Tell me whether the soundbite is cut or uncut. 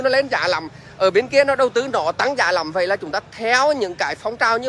uncut